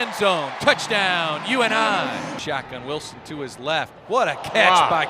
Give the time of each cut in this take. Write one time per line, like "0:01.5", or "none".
0:02.4